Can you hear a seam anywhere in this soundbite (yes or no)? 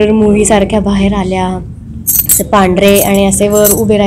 no